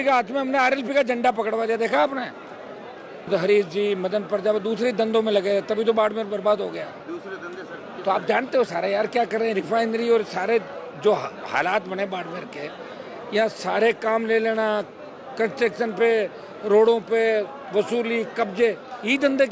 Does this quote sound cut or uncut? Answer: cut